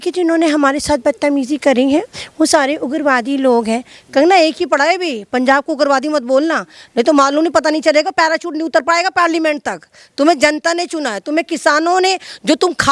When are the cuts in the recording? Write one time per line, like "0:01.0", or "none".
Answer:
none